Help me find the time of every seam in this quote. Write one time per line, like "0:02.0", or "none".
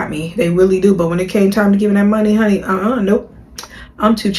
none